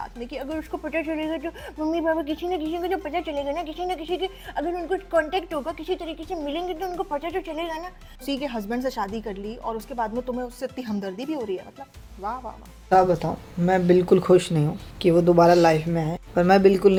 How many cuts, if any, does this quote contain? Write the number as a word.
zero